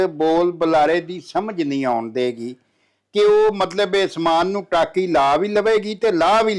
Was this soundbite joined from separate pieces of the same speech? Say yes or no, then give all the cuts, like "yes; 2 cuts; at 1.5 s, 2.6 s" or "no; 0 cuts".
no; 0 cuts